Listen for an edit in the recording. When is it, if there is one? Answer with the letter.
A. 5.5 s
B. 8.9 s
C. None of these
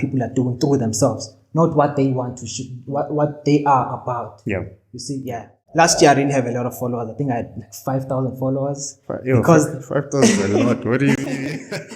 A